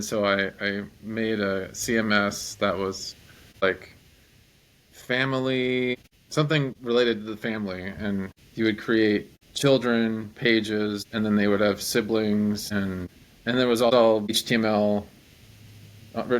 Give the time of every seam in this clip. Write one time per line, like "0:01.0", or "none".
0:03.6
0:06.0